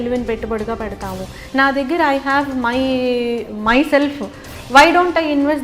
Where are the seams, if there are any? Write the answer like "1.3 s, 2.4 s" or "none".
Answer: 1.3 s